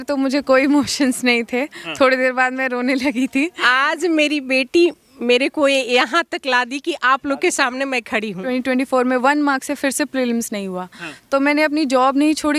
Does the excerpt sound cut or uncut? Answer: cut